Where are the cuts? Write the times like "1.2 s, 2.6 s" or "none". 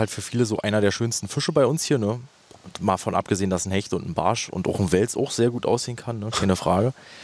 none

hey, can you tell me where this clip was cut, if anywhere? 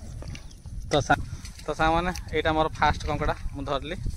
1.1 s

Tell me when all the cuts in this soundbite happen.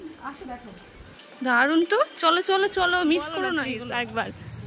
3.7 s

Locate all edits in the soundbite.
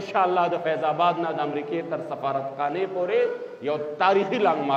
none

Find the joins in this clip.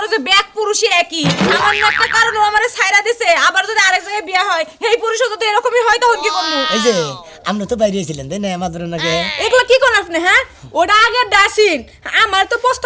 6.7 s

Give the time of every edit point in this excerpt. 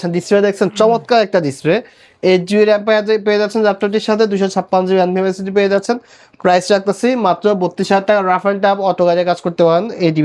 none

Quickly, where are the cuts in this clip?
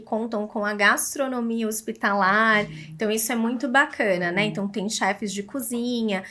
none

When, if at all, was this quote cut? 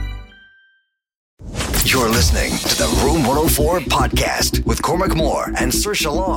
1.3 s

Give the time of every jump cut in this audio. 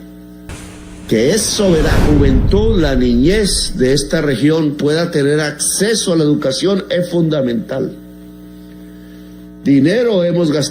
2.0 s

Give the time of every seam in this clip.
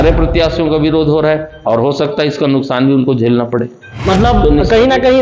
3.9 s

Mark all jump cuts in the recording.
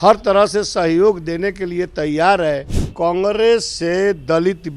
2.8 s

